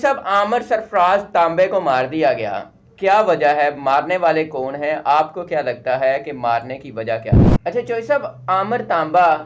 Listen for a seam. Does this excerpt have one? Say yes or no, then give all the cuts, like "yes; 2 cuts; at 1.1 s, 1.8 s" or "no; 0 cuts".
yes; 1 cut; at 7.5 s